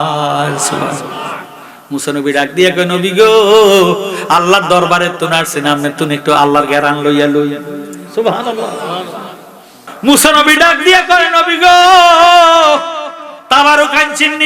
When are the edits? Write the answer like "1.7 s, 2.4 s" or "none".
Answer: 9.8 s